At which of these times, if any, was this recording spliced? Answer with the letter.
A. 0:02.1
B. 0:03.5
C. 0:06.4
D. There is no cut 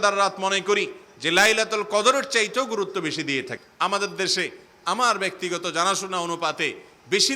B